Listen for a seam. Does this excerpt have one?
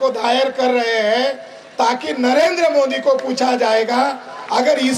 no; 0 cuts

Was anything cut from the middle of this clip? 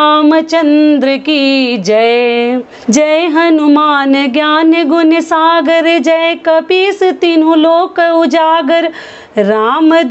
yes; 1 cut; at 2.7 s

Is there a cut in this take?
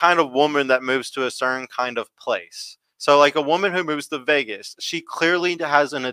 no; 0 cuts

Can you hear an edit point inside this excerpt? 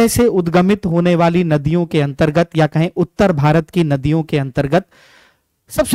no; 0 cuts

